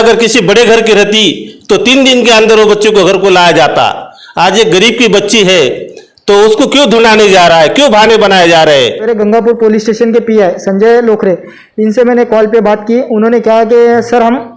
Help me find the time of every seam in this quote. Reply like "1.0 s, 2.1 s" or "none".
9.1 s